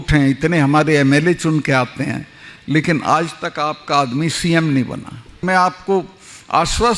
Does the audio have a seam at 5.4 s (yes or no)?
yes